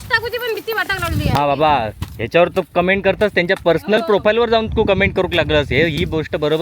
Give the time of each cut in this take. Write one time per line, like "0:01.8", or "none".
0:01.4